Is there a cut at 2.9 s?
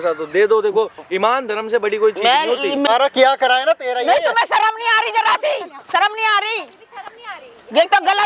yes; 1 cut; at 2.9 s

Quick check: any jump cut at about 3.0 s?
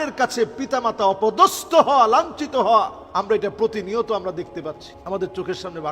yes; 2 cuts; at 3.0 s, 4.9 s

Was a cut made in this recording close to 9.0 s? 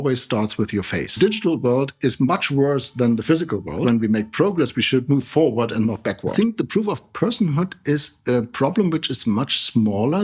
no; 3 cuts; at 1.2 s, 3.8 s, 6.3 s

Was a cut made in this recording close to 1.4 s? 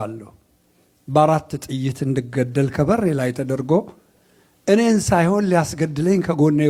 no; 0 cuts

